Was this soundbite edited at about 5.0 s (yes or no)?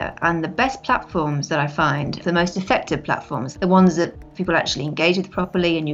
no